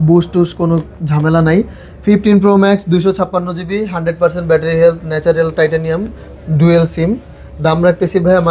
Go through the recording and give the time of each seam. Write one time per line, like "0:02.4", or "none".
none